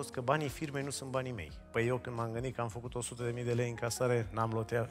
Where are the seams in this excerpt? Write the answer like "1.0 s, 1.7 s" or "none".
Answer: 1.5 s